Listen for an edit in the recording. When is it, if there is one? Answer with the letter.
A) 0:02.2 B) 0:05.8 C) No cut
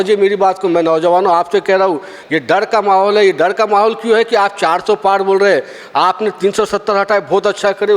A